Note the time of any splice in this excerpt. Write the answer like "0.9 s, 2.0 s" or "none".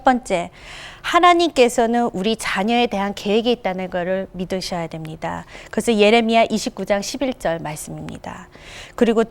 none